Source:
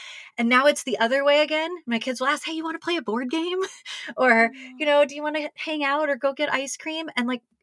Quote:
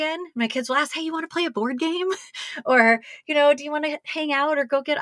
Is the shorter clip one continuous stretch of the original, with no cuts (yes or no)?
yes